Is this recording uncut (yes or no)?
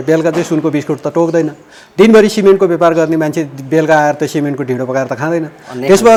yes